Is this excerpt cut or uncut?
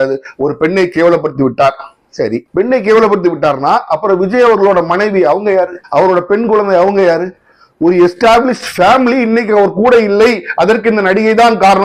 uncut